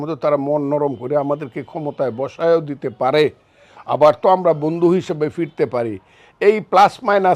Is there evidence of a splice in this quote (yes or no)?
no